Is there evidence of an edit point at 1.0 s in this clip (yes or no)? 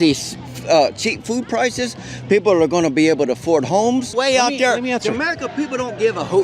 no